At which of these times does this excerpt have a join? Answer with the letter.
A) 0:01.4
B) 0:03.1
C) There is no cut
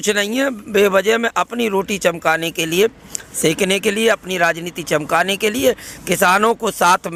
C